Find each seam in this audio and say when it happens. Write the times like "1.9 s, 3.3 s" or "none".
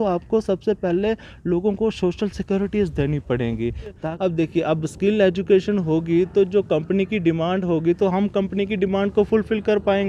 4.0 s